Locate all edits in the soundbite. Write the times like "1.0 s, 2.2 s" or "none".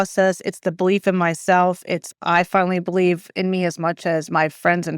none